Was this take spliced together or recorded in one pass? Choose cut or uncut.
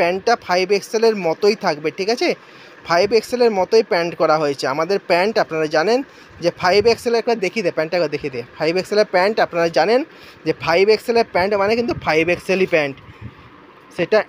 uncut